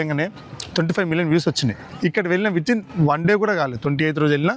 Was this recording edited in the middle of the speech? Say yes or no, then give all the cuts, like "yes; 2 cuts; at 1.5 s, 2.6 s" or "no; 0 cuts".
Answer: yes; 1 cut; at 1.8 s